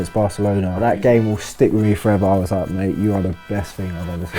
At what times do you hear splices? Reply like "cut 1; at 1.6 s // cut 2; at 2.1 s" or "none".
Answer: cut 1; at 0.9 s